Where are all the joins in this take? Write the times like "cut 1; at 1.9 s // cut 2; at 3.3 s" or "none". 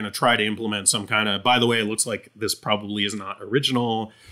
none

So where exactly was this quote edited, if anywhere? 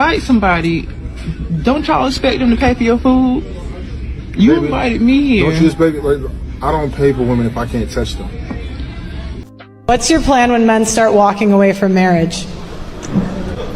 cut 1; at 9.4 s

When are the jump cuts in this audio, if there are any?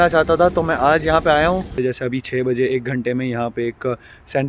cut 1; at 1.7 s

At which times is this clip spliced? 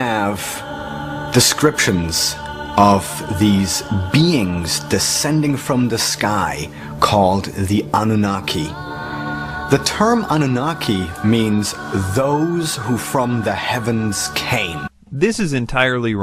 none

